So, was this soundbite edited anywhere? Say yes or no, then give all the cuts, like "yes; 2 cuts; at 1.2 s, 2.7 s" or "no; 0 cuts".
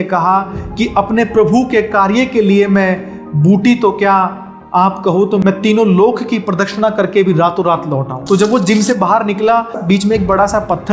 yes; 1 cut; at 8.1 s